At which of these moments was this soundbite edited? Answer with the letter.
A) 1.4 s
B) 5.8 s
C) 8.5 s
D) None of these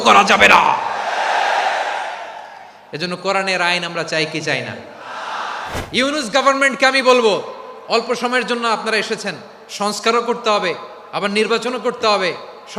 B